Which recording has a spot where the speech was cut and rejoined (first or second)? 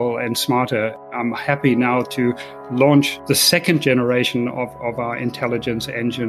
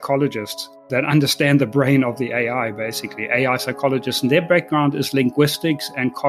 first